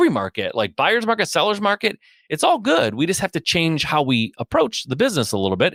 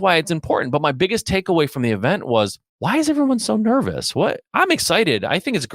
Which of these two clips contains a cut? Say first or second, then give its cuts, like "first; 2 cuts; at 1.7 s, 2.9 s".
second; 1 cut; at 2.7 s